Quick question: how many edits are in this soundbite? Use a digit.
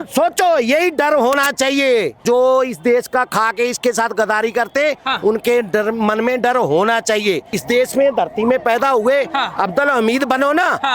2